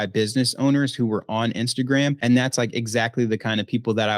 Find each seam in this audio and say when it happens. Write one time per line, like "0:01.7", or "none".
0:02.2